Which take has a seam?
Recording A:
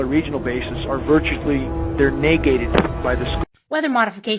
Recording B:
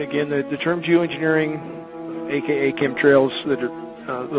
A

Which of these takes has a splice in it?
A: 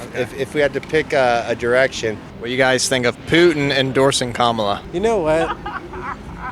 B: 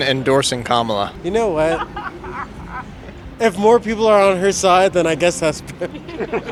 A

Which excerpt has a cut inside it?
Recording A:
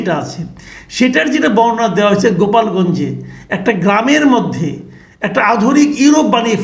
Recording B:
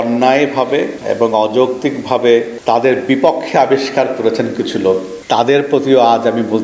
B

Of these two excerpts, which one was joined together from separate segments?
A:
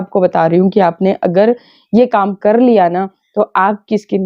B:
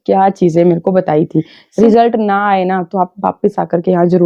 B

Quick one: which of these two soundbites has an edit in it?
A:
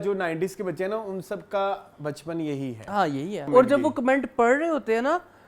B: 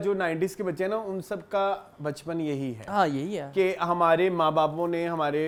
A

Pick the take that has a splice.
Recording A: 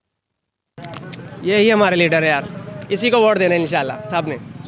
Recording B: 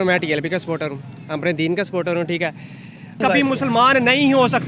B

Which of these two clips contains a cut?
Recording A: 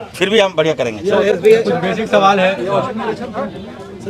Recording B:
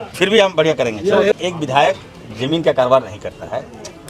B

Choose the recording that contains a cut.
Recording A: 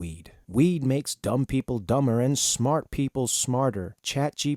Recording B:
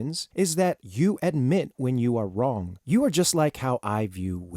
B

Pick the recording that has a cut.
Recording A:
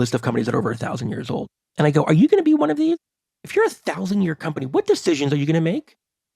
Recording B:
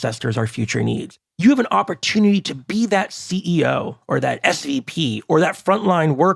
A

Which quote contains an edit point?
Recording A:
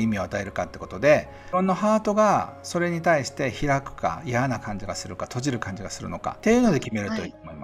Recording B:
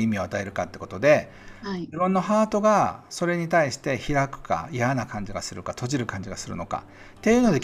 A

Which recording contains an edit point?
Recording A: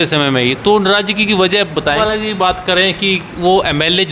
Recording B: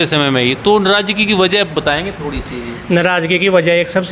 A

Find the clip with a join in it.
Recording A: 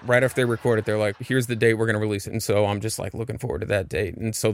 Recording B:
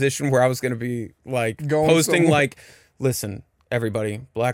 A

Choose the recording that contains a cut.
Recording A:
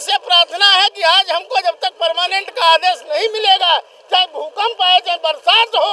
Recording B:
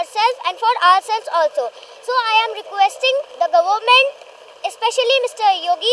B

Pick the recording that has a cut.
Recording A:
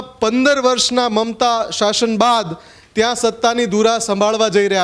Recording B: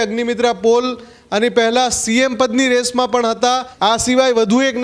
B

